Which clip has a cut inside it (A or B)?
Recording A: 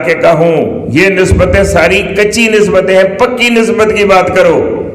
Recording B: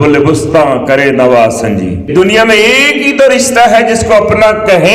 B